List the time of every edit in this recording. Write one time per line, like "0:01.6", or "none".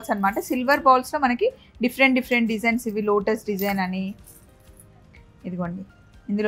none